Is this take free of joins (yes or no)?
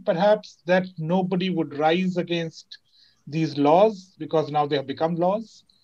yes